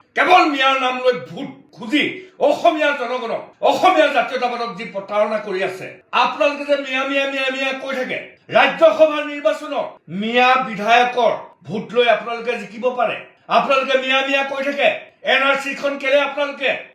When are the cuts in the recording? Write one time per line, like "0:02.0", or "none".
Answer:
0:08.3